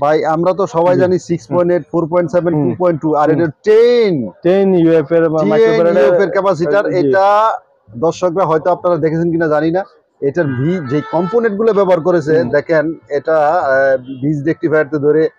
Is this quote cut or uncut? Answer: uncut